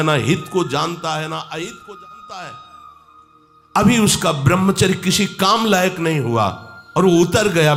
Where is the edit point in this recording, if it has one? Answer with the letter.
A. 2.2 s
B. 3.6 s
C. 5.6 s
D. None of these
D